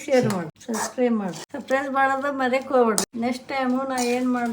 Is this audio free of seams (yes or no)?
no